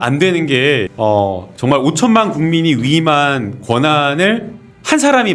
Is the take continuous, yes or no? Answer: no